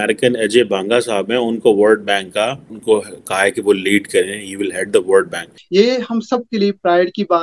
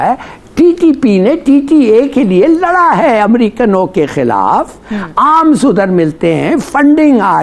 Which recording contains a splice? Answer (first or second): first